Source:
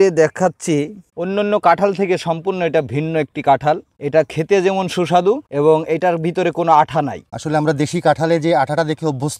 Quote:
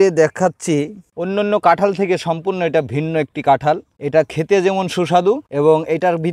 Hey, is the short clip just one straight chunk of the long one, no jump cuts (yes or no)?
yes